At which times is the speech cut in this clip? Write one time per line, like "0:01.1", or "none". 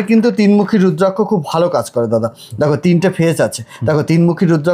none